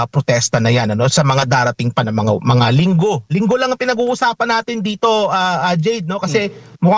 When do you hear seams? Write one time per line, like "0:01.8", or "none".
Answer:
none